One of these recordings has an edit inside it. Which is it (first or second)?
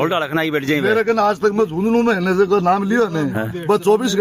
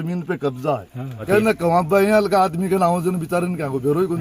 second